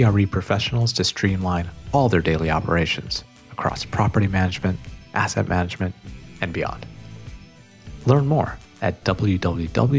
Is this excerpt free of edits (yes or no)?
yes